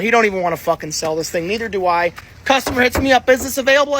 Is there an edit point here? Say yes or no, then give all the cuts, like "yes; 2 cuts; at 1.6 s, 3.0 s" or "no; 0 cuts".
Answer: no; 0 cuts